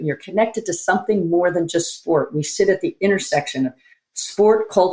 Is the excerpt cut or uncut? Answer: uncut